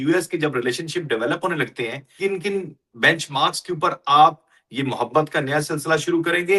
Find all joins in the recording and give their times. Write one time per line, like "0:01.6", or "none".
0:02.1